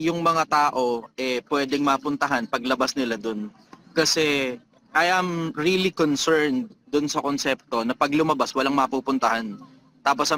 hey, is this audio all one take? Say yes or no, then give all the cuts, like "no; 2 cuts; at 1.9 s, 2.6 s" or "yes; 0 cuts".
yes; 0 cuts